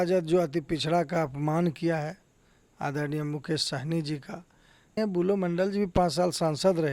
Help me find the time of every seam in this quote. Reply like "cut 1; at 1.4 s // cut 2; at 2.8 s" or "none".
cut 1; at 5.0 s